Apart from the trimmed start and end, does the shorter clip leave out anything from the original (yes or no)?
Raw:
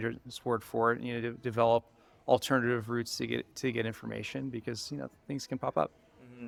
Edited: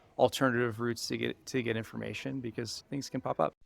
yes